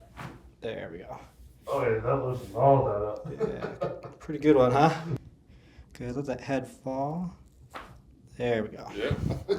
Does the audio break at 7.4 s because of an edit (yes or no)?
no